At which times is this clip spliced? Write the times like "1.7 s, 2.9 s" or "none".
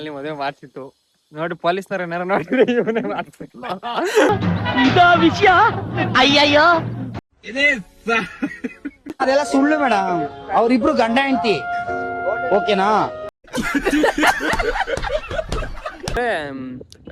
16.2 s